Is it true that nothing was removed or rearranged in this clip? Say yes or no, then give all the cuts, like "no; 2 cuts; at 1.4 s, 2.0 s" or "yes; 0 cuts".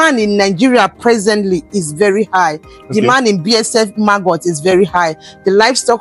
yes; 0 cuts